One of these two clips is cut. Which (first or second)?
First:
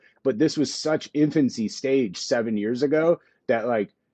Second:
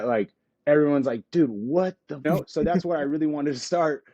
second